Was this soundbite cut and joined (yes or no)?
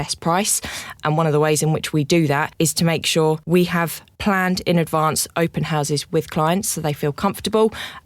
yes